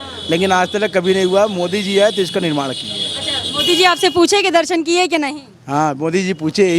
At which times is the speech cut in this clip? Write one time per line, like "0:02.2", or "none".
none